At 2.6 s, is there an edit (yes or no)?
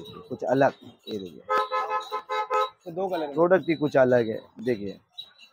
no